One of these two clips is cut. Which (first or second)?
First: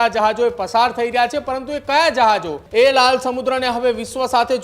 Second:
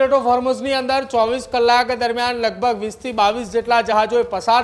first